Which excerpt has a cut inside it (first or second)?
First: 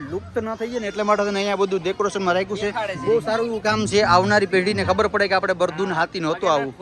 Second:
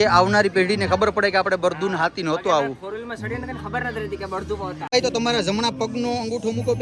second